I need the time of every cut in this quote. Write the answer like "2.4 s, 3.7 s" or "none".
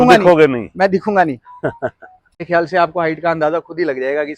2.5 s